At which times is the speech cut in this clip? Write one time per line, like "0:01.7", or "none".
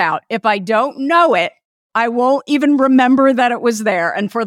0:01.8